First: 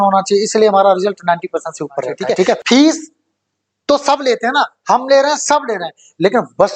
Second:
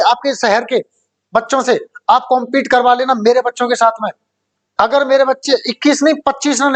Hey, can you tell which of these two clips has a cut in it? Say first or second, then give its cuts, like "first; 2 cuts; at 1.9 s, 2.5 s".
first; 1 cut; at 2.6 s